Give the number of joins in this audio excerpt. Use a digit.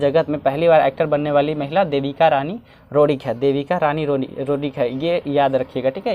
0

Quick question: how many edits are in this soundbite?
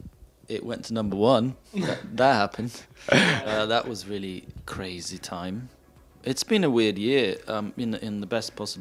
0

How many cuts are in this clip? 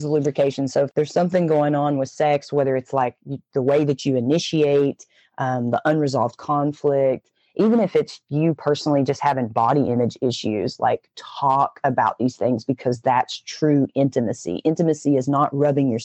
1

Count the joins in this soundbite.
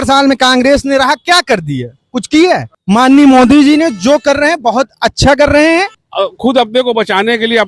2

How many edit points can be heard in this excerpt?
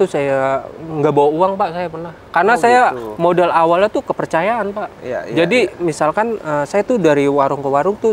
0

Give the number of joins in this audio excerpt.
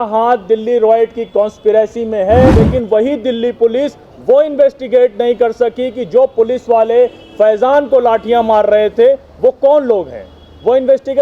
1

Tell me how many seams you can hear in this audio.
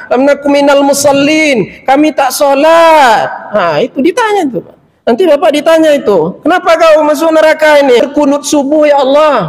1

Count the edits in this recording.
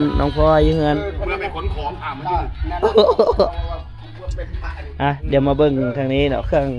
1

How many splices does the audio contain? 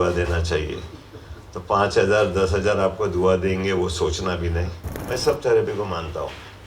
1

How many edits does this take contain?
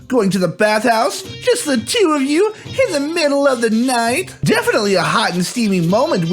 1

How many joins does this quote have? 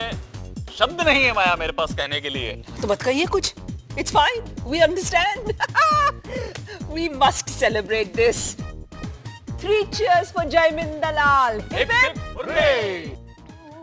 0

